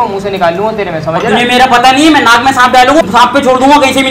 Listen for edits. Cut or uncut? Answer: cut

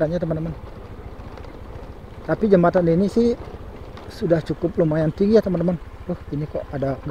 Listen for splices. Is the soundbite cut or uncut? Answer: uncut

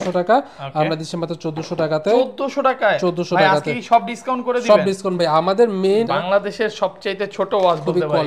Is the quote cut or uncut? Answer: cut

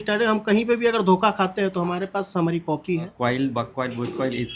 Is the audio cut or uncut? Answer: cut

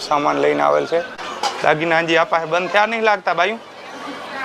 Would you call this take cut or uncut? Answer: cut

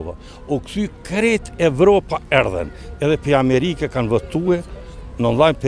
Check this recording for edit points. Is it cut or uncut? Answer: uncut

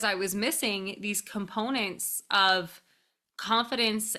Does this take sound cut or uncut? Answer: uncut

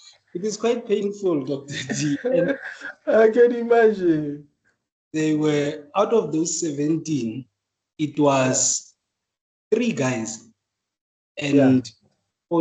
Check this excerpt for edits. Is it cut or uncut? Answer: uncut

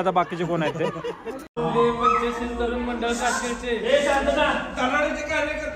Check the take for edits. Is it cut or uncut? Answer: cut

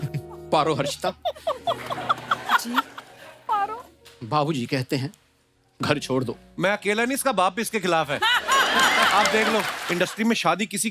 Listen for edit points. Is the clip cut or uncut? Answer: cut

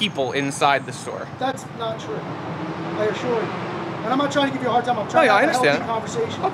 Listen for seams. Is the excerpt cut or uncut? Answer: uncut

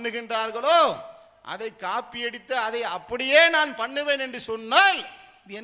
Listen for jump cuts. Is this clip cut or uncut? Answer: uncut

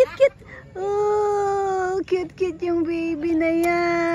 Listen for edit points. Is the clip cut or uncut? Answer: uncut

